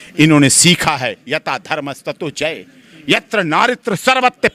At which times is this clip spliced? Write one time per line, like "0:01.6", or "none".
none